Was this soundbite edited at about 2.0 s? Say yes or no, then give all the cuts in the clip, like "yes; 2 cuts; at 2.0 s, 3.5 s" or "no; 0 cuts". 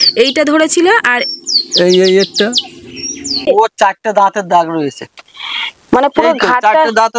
no; 1 cut; at 3.4 s